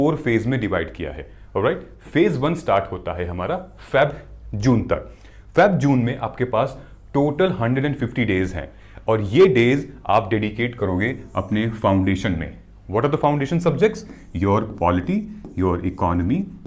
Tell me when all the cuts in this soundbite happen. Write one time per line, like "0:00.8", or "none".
none